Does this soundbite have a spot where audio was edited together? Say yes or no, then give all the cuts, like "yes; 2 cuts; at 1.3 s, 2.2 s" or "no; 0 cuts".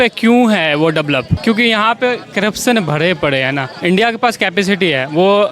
yes; 2 cuts; at 1.3 s, 3.7 s